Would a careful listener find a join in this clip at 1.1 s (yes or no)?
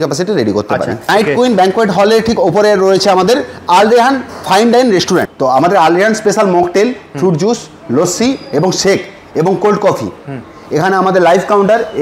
yes